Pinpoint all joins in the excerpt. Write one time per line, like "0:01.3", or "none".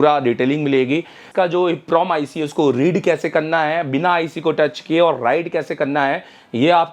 0:01.2